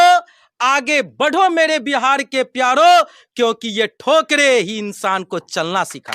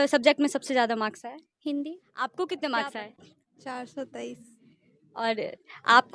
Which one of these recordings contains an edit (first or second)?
second